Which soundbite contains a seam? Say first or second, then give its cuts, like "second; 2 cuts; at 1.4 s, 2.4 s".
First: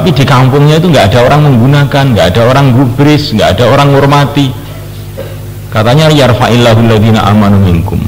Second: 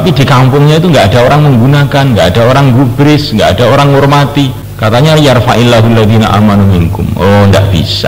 second; 1 cut; at 4.6 s